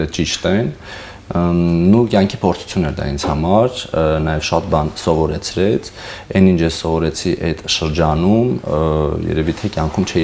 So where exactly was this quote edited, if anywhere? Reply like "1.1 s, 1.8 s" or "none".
none